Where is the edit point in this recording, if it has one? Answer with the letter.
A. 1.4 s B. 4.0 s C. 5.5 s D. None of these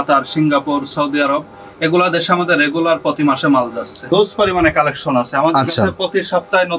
B